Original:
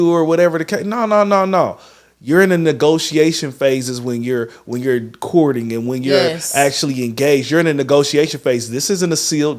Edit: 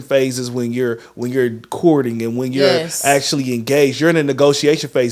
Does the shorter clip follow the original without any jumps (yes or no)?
yes